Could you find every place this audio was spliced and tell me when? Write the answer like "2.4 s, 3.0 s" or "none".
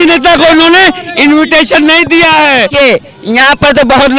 2.7 s